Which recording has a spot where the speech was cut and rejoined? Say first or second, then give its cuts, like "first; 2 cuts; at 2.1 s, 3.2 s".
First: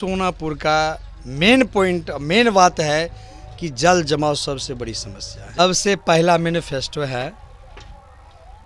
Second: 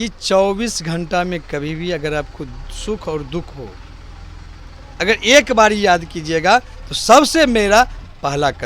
first; 1 cut; at 5.6 s